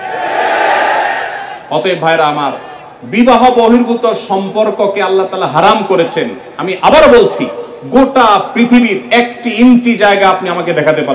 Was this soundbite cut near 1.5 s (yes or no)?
no